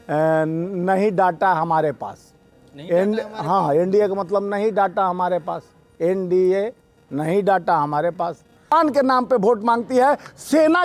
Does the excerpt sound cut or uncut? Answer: cut